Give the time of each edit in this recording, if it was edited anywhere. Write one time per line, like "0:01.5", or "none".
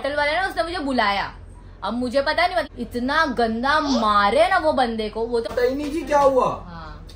0:02.7
0:05.5